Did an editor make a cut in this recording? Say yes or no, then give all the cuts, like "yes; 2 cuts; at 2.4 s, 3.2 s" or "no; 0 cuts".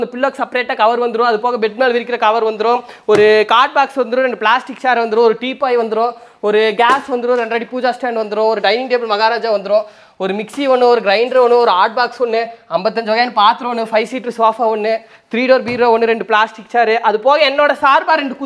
no; 0 cuts